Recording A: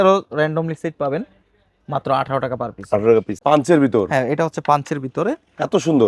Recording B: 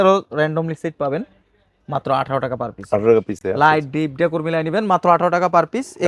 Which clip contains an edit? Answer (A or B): A